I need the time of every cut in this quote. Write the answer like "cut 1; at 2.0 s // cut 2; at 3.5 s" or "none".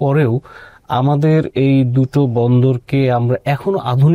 none